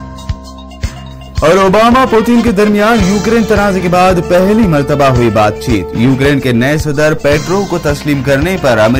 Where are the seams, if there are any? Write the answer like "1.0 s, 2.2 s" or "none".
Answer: none